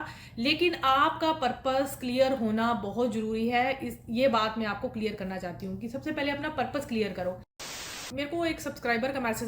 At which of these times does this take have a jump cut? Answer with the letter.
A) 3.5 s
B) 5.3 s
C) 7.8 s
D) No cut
C